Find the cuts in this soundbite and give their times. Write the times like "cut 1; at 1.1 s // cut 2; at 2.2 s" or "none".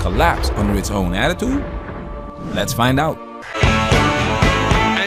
none